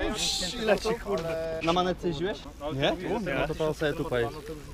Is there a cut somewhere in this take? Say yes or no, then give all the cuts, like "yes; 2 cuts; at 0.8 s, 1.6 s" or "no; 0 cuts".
yes; 2 cuts; at 1.6 s, 2.5 s